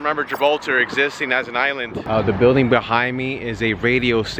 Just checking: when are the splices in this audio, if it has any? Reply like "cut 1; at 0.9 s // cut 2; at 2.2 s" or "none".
cut 1; at 2.0 s

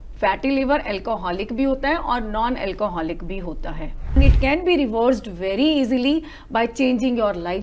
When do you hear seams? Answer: cut 1; at 4.1 s

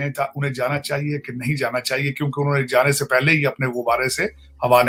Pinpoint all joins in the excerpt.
none

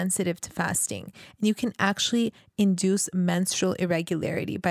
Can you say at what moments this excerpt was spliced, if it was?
none

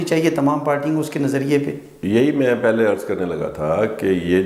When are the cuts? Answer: none

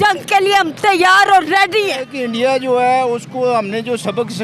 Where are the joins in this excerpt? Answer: cut 1; at 2.1 s

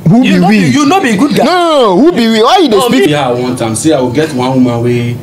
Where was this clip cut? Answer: cut 1; at 3.1 s

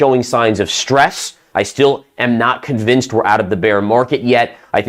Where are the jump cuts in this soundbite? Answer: cut 1; at 1.4 s

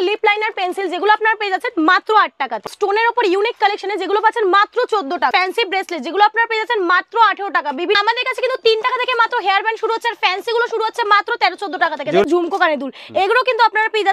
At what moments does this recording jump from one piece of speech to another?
cut 1; at 2.7 s // cut 2; at 5.3 s // cut 3; at 8.0 s // cut 4; at 12.2 s

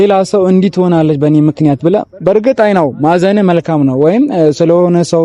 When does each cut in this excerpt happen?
none

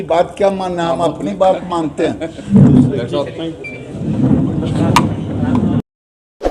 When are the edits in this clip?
none

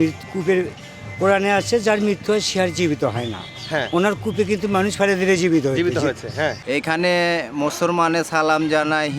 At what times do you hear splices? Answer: cut 1; at 6.6 s

